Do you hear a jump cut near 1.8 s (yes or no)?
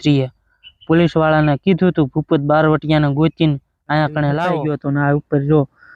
no